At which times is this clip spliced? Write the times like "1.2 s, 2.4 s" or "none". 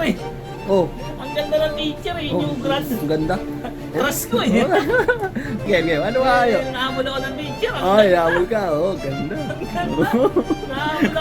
5.7 s